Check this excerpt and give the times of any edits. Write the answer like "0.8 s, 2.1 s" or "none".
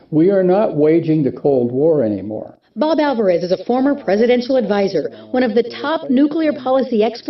none